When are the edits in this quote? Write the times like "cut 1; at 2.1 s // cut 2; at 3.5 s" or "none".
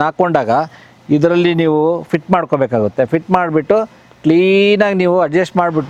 none